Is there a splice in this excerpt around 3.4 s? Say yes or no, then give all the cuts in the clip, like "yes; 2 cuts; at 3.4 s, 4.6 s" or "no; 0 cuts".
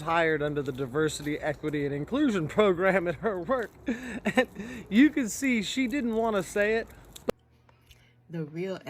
no; 1 cut; at 7.2 s